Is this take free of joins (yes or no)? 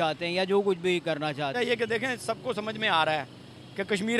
no